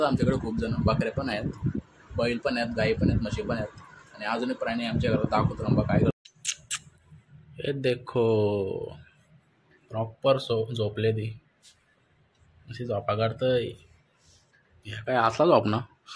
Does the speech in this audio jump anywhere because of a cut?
no; 0 cuts

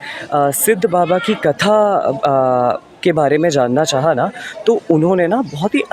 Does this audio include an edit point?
no; 0 cuts

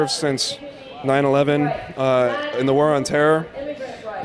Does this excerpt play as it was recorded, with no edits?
no; 1 cut; at 2.6 s

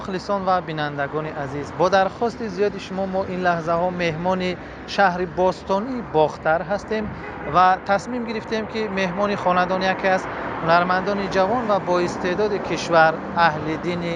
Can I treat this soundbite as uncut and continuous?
yes; 0 cuts

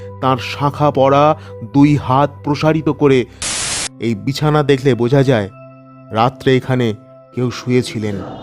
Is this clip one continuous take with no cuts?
no; 1 cut; at 3.7 s

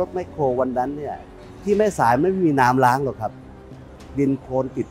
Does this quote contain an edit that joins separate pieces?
no; 0 cuts

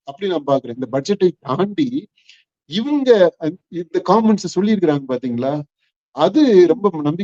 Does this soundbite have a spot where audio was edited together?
no; 0 cuts

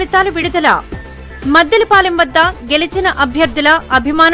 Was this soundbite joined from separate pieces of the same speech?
no; 0 cuts

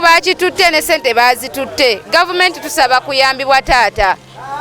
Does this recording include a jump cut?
no; 0 cuts

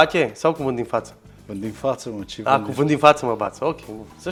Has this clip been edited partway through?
no; 0 cuts

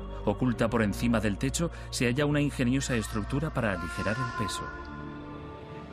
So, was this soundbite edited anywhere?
yes; 1 cut; at 4.3 s

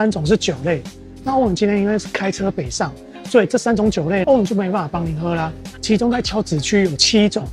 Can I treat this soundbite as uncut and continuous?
yes; 0 cuts

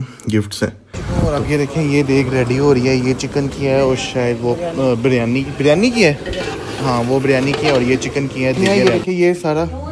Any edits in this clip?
yes; 2 cuts; at 1.0 s, 8.6 s

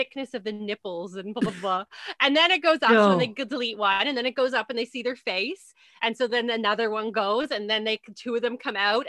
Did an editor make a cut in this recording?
no; 0 cuts

